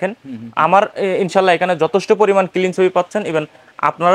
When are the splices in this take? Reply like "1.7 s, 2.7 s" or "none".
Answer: none